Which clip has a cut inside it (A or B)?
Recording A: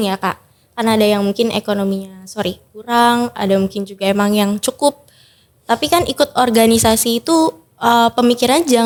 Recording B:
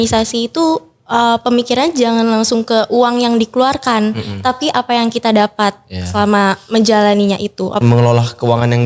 B